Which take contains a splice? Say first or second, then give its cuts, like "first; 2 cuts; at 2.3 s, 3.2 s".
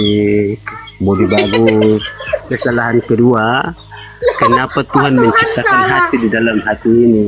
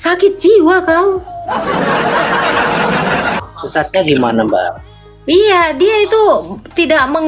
second; 1 cut; at 3.4 s